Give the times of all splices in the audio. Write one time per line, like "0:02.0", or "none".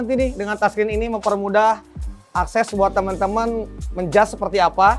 none

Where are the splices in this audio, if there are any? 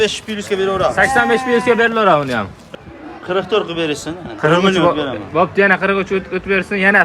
0:02.6

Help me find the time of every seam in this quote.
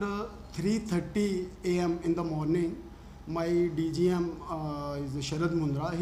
none

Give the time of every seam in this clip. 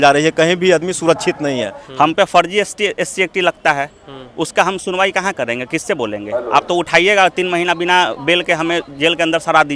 0:01.8

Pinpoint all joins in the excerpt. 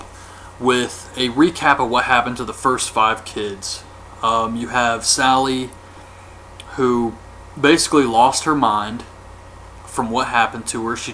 0:08.1

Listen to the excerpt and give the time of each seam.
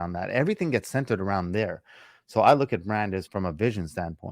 0:03.3

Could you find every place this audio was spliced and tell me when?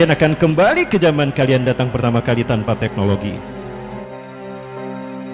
0:04.0

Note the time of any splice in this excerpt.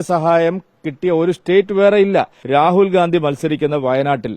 0:02.4

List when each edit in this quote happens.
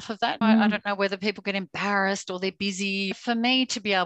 0:03.1

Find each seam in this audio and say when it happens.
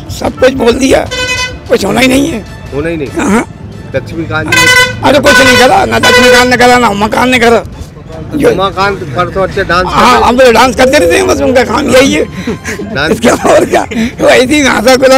none

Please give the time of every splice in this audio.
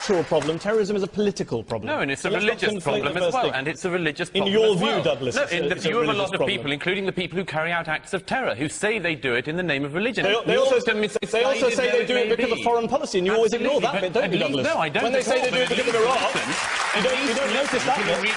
0:01.8

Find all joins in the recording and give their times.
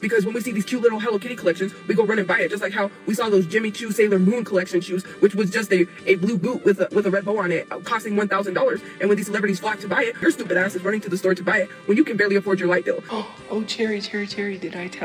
0:10.2
0:13.1

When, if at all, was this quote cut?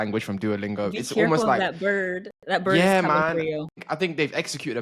none

